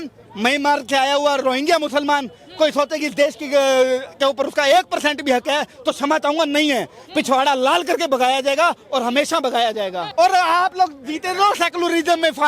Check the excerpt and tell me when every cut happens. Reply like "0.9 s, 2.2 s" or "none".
10.1 s